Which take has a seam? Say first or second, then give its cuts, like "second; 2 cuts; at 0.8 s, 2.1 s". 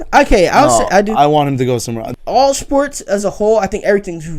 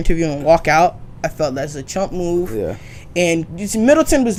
first; 1 cut; at 1.9 s